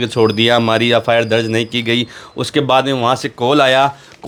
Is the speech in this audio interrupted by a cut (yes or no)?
no